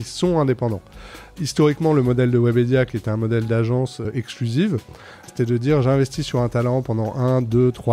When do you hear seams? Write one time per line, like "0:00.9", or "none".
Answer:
0:04.1
0:05.3